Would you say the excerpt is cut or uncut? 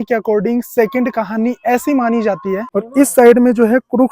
cut